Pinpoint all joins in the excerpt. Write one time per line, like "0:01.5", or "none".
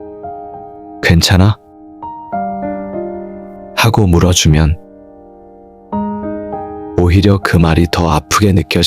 0:01.7
0:03.4
0:04.9
0:06.9